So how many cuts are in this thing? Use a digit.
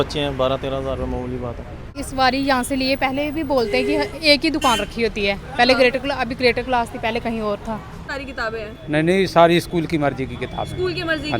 2